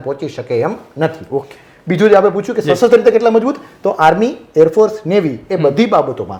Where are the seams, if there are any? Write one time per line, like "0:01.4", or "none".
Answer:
none